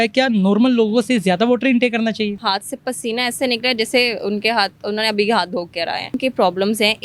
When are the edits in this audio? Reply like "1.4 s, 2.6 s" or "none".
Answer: 2.4 s, 6.1 s